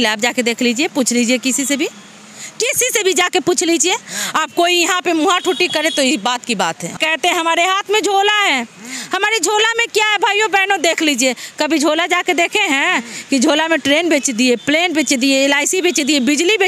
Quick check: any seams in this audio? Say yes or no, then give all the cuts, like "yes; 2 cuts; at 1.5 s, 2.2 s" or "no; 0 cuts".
yes; 1 cut; at 7.0 s